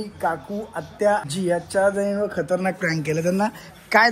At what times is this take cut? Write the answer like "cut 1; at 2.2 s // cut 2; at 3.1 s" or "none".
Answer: cut 1; at 1.2 s

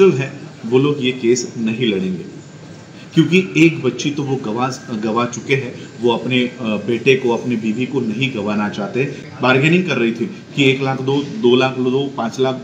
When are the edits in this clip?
cut 1; at 9.2 s

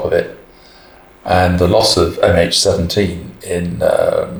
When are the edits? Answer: none

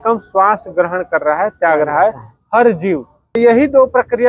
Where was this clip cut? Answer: cut 1; at 3.4 s

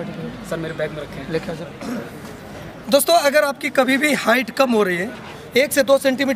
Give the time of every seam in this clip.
cut 1; at 1.6 s // cut 2; at 2.7 s // cut 3; at 5.4 s

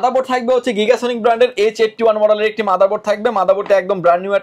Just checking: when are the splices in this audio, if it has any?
none

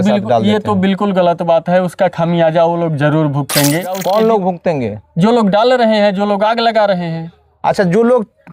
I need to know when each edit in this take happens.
cut 1; at 4.0 s

